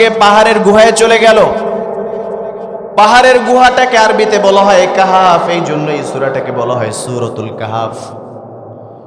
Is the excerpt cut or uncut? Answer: uncut